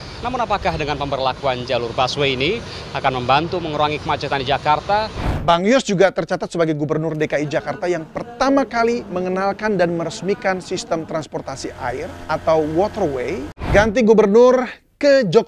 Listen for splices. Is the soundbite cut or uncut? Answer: cut